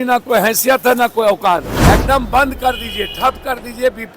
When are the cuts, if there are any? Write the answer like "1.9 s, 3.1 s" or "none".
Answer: 1.7 s